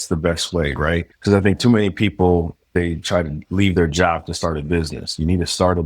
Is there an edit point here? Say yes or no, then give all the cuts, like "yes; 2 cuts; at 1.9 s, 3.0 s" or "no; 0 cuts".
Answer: yes; 1 cut; at 1.1 s